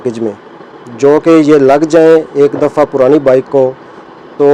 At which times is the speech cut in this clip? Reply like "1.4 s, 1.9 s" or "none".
none